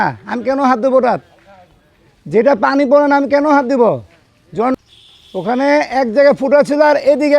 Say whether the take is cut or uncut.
cut